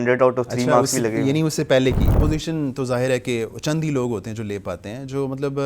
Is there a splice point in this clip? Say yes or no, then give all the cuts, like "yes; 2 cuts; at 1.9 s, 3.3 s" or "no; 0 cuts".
yes; 1 cut; at 2.1 s